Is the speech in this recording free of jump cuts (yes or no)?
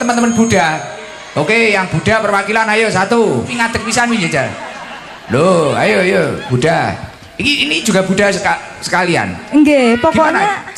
no